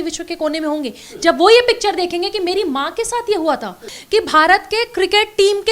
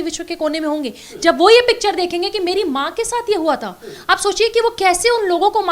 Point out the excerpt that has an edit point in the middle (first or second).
first